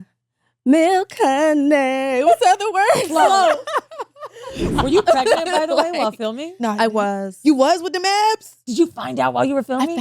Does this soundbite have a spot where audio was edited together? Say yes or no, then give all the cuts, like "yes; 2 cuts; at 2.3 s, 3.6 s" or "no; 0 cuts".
yes; 2 cuts; at 4.6 s, 8.6 s